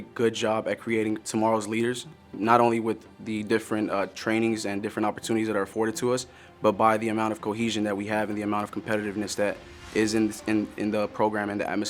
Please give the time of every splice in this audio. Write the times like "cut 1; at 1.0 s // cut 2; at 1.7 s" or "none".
none